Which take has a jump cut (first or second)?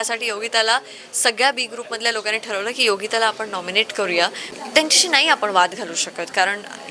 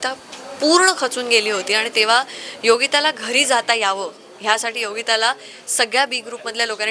first